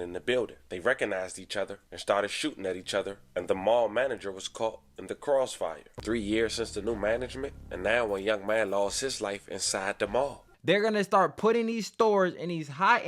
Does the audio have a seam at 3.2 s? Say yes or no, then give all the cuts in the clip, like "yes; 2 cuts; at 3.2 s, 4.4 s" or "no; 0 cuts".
no; 2 cuts; at 5.9 s, 10.5 s